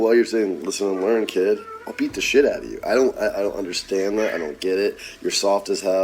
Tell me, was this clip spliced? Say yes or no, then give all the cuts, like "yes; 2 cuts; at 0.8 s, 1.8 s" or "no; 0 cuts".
no; 0 cuts